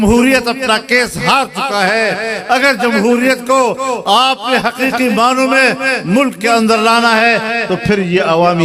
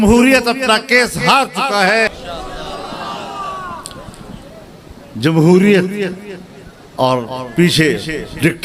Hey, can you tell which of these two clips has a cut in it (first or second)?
second